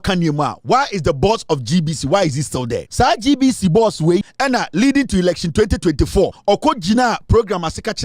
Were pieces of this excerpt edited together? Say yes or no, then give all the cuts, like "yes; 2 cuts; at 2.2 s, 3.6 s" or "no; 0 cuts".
yes; 3 cuts; at 2.8 s, 4.3 s, 6.4 s